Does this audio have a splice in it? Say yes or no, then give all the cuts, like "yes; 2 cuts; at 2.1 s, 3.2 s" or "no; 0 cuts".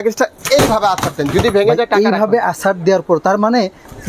no; 0 cuts